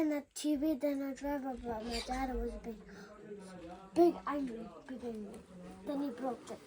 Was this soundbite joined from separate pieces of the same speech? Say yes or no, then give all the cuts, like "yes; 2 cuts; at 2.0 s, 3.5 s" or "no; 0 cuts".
no; 0 cuts